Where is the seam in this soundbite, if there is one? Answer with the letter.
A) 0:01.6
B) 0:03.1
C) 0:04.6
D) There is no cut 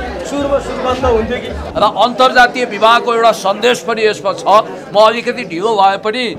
A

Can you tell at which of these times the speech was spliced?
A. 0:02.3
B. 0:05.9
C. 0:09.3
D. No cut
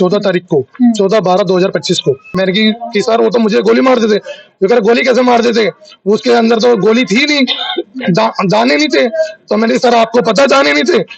A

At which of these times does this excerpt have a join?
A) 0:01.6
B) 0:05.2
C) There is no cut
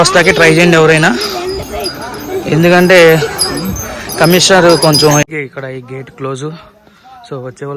B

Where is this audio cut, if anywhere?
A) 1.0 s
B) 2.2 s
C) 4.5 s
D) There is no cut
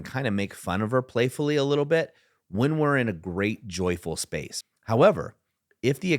C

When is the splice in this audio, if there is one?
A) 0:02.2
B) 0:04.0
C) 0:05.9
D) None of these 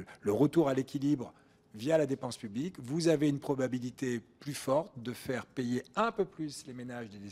D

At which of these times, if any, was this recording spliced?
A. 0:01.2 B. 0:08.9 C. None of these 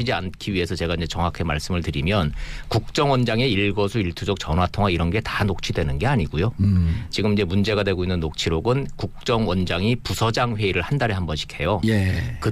A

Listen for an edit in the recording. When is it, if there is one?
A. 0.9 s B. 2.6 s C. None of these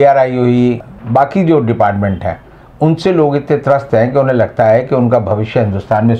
A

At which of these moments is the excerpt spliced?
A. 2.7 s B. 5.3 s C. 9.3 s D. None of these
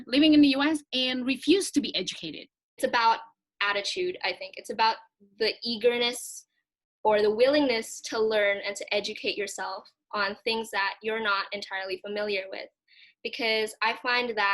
A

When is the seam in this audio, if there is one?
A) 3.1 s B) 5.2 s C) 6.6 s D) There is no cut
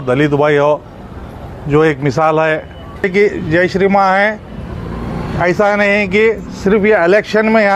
A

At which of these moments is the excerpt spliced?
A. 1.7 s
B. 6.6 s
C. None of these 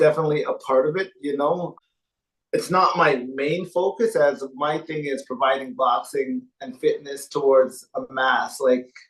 A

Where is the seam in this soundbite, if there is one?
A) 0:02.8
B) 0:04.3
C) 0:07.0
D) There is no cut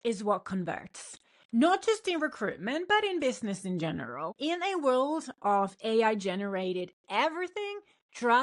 B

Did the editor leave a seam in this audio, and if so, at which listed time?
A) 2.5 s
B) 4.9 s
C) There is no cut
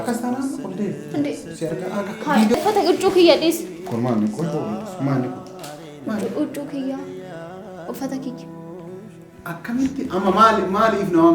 A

